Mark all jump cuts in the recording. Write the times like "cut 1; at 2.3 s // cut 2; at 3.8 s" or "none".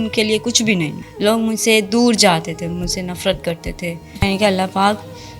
cut 1; at 1.0 s // cut 2; at 4.2 s